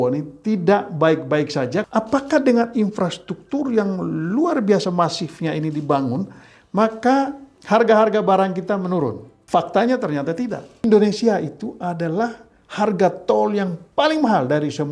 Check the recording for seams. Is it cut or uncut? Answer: cut